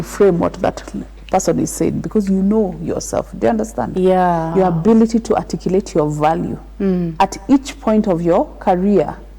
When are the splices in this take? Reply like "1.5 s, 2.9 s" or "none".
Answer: 4.5 s